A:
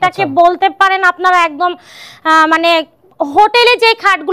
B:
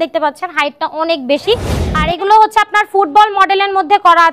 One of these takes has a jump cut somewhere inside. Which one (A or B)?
B